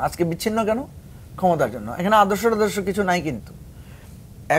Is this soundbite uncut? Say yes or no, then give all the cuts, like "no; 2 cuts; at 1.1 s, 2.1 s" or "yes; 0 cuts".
yes; 0 cuts